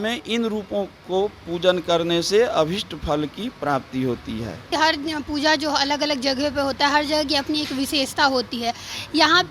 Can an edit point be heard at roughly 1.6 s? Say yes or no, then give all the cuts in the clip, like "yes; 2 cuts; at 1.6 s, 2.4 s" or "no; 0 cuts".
no; 1 cut; at 4.7 s